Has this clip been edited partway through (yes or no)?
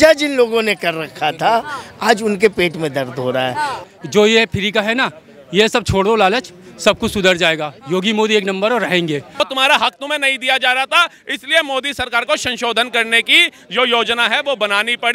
yes